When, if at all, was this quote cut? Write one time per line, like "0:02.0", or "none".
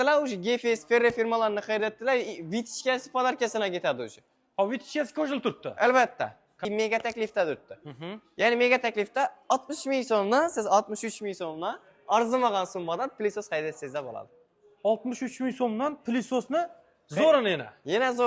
0:06.6